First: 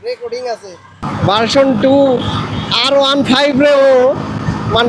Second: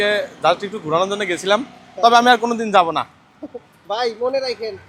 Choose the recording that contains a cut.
first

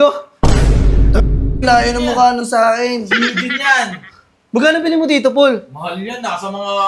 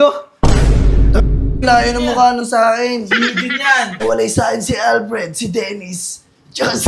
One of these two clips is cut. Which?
second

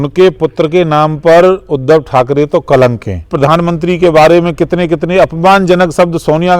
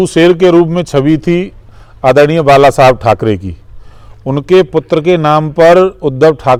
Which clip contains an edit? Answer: first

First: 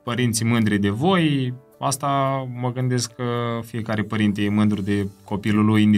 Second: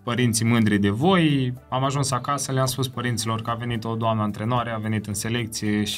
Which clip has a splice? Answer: second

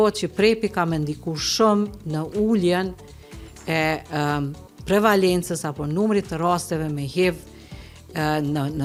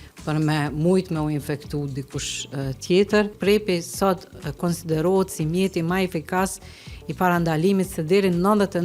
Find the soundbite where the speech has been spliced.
second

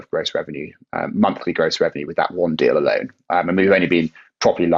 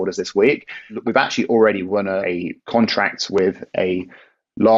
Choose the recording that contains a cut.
second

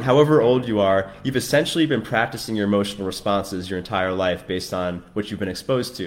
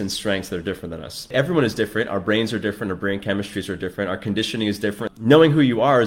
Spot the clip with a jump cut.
second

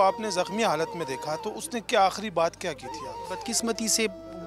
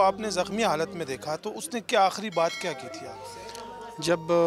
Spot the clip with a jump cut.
first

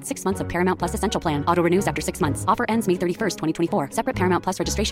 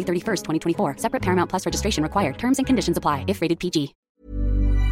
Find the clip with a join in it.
second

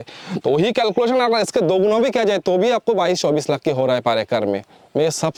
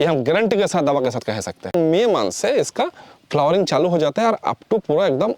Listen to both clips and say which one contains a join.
second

